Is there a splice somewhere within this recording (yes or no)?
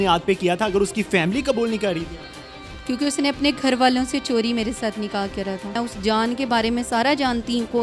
yes